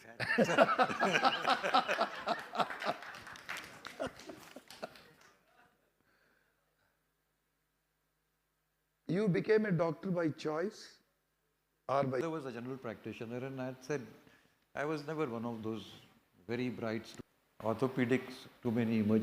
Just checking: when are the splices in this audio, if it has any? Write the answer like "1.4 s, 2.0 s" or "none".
12.2 s, 17.1 s